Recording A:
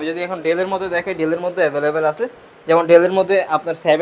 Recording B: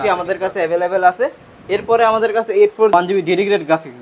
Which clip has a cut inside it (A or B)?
B